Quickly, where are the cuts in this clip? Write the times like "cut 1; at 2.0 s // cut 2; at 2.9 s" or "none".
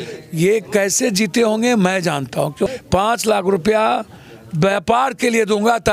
cut 1; at 2.7 s